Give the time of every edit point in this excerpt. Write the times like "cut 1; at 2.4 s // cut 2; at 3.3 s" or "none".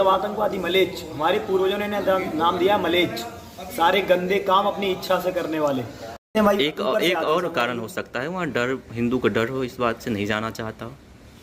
cut 1; at 6.3 s